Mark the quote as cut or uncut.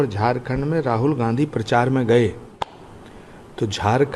uncut